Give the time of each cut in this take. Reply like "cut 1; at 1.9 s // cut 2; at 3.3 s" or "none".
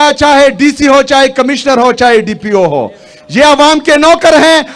none